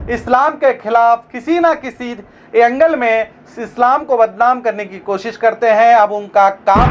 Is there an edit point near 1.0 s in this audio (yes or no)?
no